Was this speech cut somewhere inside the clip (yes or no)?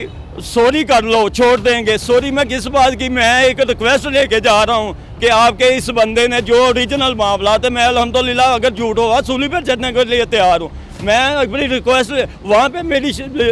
no